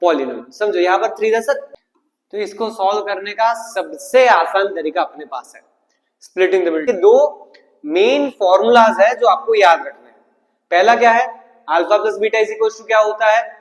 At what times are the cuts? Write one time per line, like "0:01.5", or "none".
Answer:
0:01.8
0:06.9

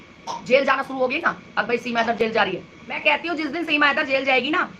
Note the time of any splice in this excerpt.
0:03.0

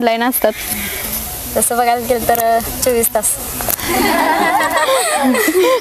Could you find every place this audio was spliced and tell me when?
none

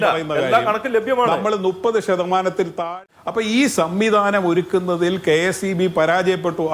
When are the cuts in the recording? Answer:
0:02.8

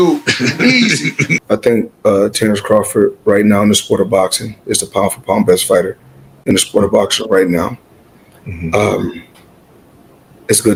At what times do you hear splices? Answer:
none

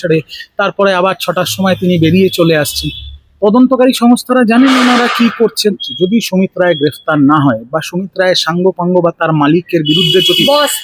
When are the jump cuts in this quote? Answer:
0:05.9

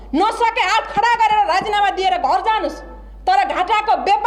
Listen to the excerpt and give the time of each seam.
none

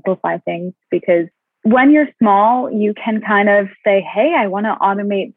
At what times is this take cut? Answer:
0:01.4

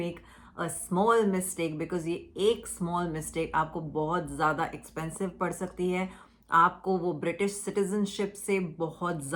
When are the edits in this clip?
none

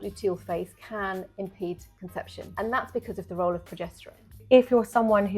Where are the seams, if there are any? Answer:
0:02.5
0:04.4

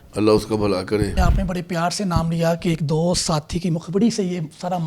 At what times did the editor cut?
0:01.2

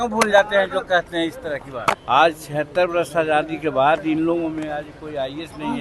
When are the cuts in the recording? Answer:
0:02.0

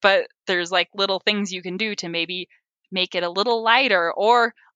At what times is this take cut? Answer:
none

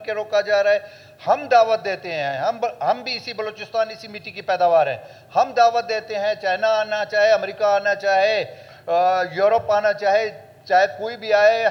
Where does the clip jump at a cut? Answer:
none

